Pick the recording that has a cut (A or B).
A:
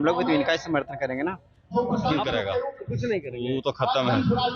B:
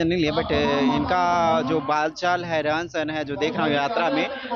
A